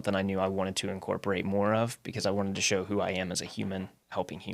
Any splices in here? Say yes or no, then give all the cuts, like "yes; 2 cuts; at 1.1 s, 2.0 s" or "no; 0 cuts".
no; 0 cuts